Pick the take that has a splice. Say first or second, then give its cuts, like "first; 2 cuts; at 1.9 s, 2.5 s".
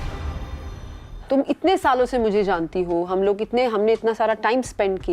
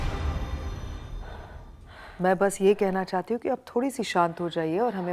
first; 1 cut; at 1.1 s